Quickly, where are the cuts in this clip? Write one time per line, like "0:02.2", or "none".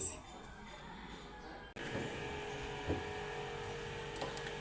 0:01.8

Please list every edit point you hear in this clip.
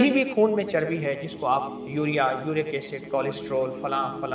0:01.8

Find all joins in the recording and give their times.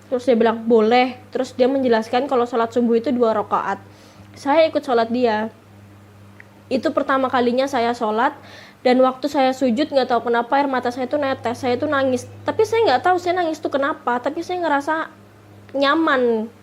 none

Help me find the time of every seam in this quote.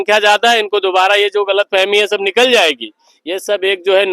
none

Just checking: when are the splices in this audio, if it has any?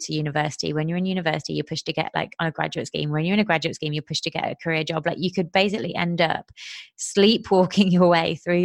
none

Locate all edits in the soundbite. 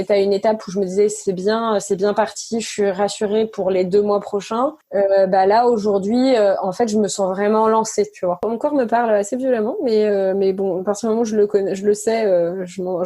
0:04.8
0:08.4

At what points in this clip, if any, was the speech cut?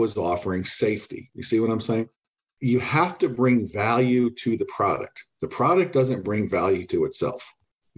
0:02.4

